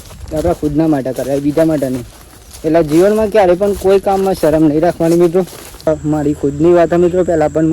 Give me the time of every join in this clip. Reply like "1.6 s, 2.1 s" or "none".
5.9 s